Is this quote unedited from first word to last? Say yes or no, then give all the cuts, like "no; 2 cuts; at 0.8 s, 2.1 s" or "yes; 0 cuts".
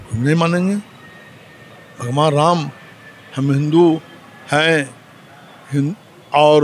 yes; 0 cuts